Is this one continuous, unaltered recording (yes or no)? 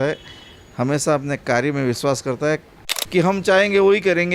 no